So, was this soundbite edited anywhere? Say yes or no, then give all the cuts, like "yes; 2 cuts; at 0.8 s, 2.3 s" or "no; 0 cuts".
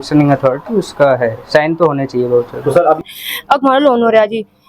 yes; 1 cut; at 3.1 s